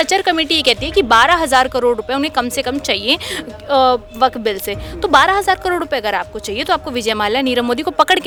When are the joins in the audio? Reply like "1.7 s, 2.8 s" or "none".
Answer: none

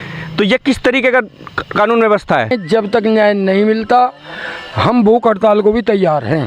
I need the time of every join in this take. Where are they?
2.6 s

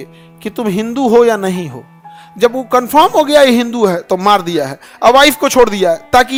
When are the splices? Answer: none

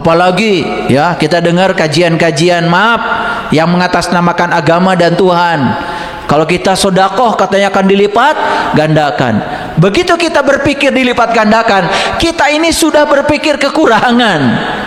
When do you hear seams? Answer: none

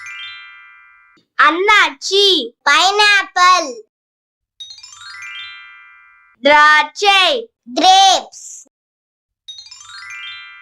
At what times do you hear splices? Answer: 1.0 s, 4.6 s, 6.2 s

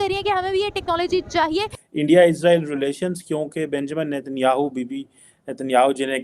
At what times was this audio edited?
1.7 s

